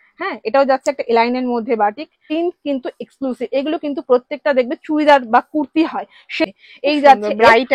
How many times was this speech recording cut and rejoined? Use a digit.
2